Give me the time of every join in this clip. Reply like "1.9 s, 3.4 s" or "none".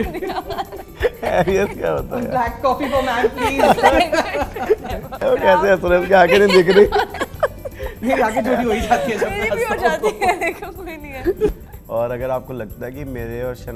5.1 s, 11.5 s